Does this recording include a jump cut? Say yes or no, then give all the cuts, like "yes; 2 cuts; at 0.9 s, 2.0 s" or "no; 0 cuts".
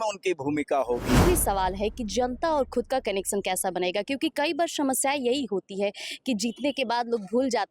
yes; 1 cut; at 1.2 s